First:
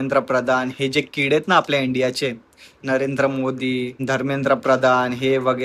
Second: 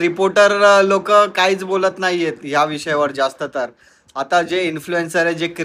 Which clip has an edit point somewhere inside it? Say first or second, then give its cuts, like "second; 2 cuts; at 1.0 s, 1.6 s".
first; 1 cut; at 3.9 s